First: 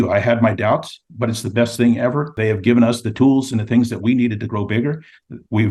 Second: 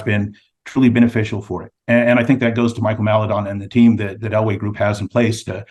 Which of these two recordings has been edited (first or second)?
first